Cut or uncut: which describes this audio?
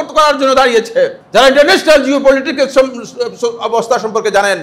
cut